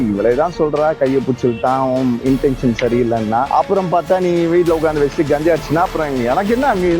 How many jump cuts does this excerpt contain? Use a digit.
1